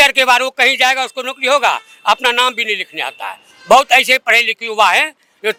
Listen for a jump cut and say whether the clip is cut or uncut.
uncut